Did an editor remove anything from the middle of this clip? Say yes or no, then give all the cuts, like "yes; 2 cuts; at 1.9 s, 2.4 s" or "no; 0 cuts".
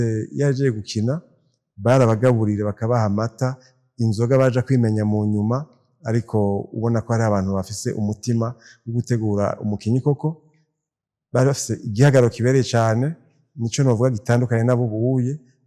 no; 0 cuts